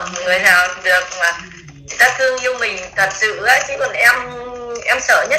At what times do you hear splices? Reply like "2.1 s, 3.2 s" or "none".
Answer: none